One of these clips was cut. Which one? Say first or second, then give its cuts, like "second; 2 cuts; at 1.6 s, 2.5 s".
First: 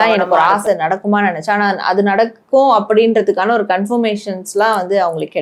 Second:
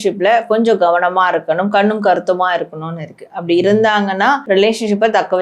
second; 1 cut; at 4.4 s